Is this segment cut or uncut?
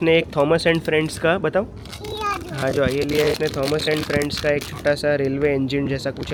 uncut